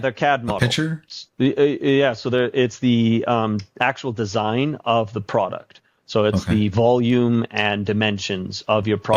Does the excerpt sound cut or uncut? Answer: uncut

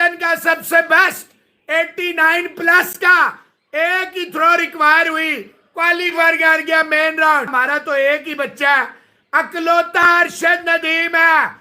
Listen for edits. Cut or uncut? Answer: cut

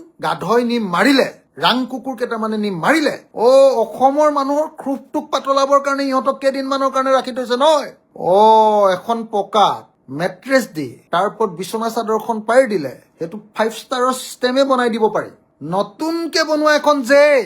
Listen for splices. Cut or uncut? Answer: cut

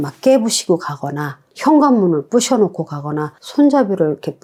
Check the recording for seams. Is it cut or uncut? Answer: uncut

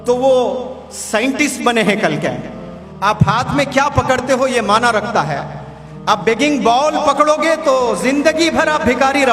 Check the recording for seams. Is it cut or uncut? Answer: uncut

